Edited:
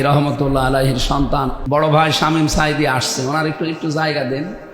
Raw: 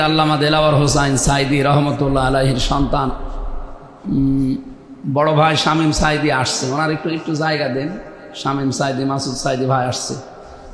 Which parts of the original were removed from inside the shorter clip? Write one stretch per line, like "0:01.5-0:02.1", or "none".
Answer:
0:03.2-0:05.0